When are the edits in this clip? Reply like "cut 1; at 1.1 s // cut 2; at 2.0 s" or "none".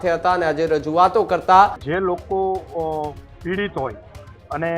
cut 1; at 1.8 s